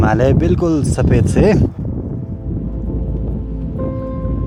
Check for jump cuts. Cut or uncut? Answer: uncut